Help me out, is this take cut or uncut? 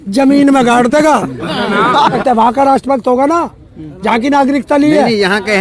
cut